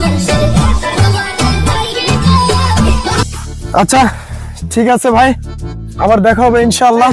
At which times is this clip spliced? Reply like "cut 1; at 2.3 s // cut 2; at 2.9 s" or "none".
none